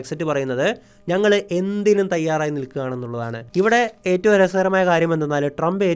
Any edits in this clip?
yes; 1 cut; at 3.4 s

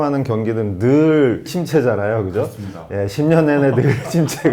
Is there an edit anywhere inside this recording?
yes; 2 cuts; at 1.4 s, 2.9 s

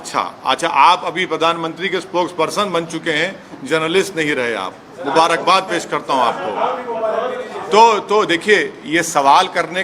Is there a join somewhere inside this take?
no; 0 cuts

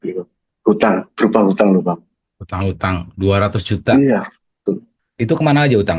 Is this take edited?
no; 0 cuts

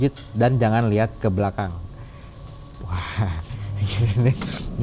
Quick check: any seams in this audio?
no; 0 cuts

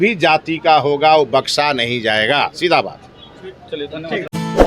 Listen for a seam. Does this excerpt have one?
no; 0 cuts

